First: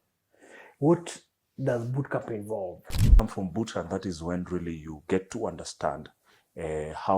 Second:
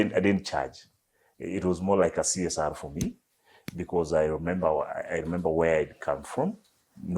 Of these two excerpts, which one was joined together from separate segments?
first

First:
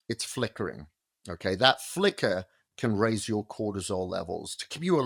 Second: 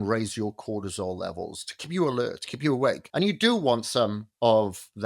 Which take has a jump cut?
second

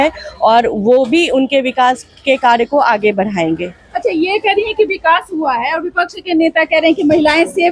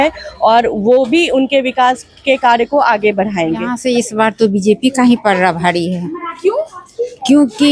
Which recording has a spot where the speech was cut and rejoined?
second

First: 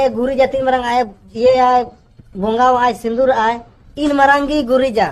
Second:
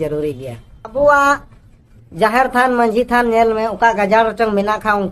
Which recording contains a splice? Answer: second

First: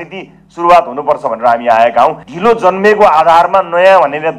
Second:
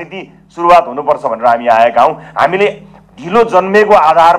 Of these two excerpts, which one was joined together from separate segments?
first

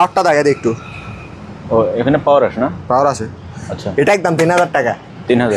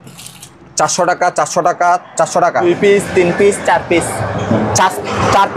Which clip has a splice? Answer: second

